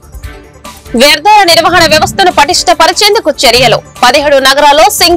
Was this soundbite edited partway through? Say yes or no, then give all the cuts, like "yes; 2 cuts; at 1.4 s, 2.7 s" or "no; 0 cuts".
yes; 1 cut; at 0.9 s